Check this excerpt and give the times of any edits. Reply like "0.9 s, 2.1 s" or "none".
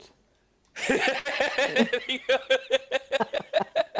none